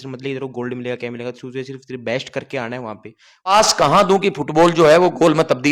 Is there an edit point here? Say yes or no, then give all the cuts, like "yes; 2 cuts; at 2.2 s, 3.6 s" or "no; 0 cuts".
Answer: yes; 1 cut; at 3.5 s